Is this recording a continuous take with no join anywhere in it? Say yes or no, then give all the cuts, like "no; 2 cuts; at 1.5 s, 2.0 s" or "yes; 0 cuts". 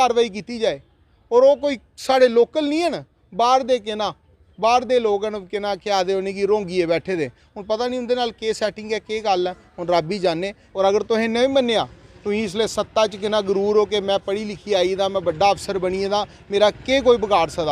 no; 1 cut; at 10.6 s